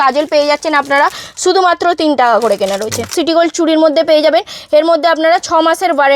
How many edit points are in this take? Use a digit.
1